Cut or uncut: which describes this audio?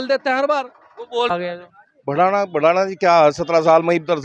cut